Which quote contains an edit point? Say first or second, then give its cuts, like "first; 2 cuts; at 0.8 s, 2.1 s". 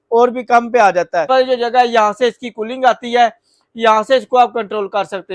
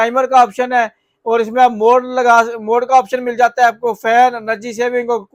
first; 1 cut; at 1.3 s